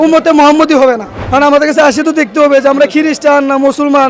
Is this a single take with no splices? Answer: no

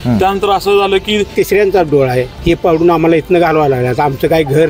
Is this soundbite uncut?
no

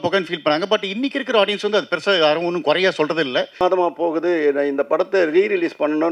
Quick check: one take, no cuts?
no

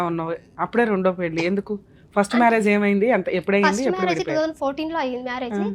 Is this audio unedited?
yes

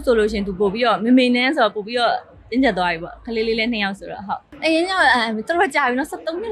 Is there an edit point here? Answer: yes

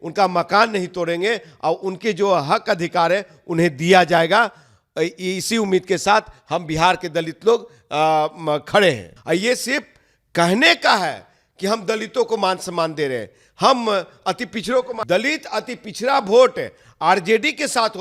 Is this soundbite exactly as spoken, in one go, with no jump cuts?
no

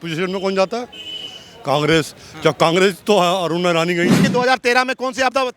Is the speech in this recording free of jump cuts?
no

